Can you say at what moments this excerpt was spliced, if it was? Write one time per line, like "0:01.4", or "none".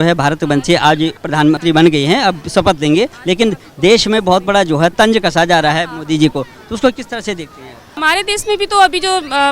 0:01.4
0:03.2
0:04.9
0:07.9